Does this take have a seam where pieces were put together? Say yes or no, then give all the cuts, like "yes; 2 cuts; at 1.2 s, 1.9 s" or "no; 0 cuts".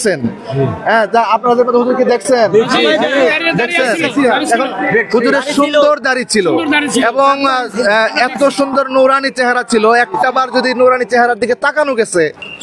no; 0 cuts